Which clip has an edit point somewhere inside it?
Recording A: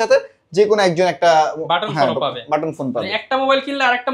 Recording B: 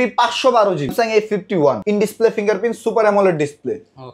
B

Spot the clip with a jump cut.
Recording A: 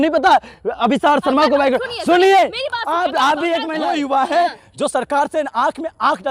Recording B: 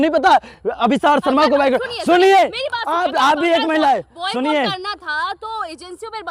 A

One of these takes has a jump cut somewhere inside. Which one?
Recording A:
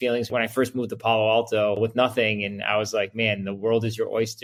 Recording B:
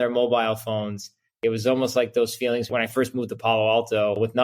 B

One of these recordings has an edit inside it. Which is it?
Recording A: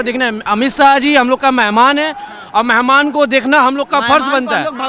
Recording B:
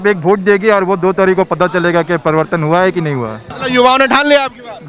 B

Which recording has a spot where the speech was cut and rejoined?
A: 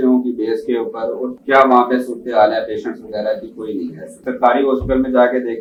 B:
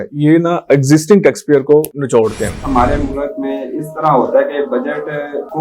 B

